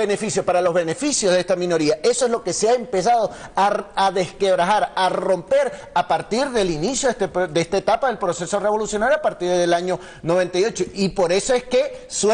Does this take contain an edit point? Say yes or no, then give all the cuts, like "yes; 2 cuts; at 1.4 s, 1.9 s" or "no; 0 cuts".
yes; 1 cut; at 1.2 s